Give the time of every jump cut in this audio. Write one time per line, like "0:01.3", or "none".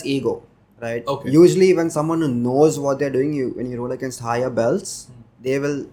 none